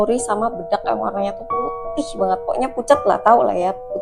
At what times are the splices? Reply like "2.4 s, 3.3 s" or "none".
none